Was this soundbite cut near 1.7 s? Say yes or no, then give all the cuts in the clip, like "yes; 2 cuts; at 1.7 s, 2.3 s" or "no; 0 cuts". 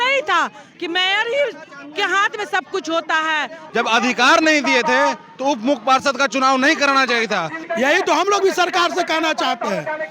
no; 2 cuts; at 3.6 s, 7.6 s